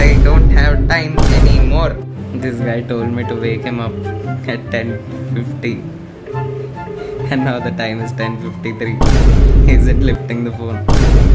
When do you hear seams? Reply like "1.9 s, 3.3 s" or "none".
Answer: 1.9 s